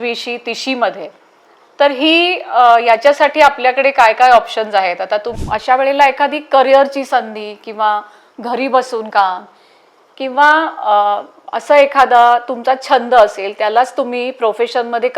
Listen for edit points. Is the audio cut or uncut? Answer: cut